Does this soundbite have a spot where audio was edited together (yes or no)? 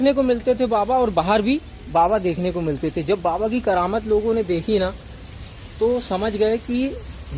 no